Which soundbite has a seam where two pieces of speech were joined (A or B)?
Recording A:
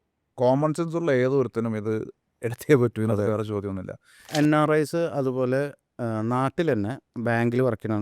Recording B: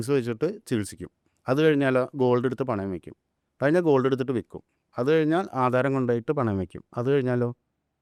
A